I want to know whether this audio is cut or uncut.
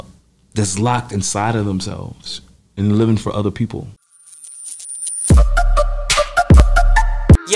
cut